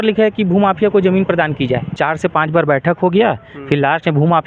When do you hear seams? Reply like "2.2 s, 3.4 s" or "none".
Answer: 1.9 s

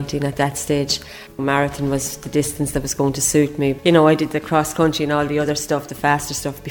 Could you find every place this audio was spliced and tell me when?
1.4 s, 3.8 s

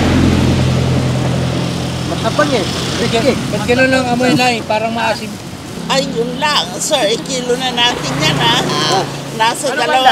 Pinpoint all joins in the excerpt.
5.8 s

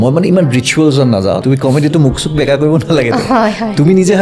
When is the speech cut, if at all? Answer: 1.4 s

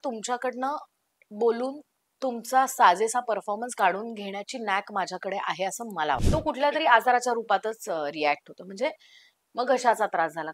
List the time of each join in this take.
6.2 s

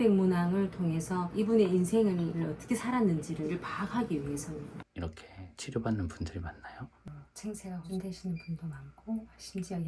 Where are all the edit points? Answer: 4.8 s, 7.1 s

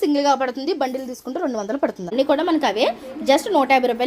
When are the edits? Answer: 2.1 s

